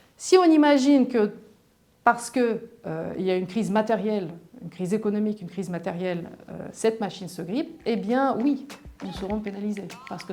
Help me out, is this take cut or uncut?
uncut